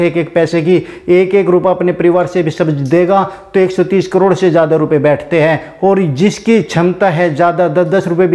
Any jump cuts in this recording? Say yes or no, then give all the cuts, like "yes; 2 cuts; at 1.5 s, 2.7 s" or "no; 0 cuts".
no; 0 cuts